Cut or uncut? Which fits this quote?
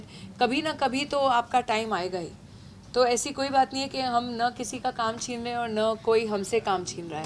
uncut